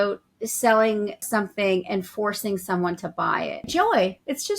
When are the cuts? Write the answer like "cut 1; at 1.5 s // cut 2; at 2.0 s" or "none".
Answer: cut 1; at 1.2 s // cut 2; at 3.6 s